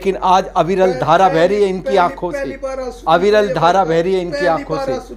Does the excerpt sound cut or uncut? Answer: uncut